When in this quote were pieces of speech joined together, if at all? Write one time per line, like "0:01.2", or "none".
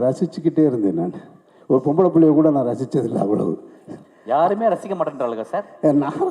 none

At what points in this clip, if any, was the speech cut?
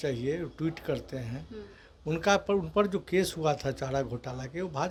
none

